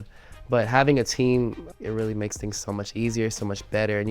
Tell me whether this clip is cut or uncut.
cut